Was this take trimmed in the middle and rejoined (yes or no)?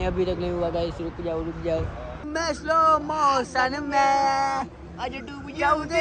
yes